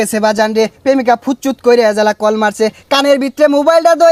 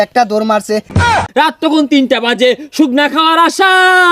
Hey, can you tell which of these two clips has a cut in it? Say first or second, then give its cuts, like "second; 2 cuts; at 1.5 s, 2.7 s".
second; 1 cut; at 1.1 s